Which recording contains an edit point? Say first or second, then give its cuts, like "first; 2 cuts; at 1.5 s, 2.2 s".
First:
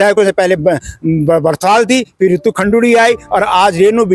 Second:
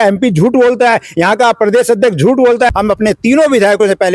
second; 1 cut; at 2.7 s